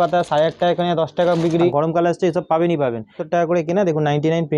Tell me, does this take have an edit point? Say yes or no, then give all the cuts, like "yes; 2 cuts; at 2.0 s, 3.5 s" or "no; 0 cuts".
yes; 2 cuts; at 1.7 s, 3.2 s